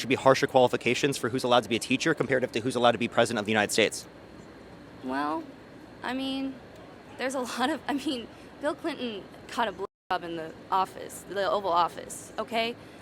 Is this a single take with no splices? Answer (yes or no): yes